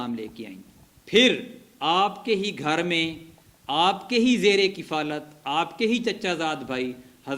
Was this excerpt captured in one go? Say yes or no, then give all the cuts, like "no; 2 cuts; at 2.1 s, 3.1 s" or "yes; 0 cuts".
yes; 0 cuts